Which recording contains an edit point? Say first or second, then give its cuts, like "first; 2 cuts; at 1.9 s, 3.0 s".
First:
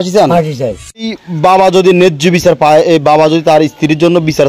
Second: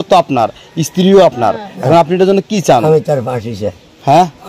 first; 1 cut; at 1.0 s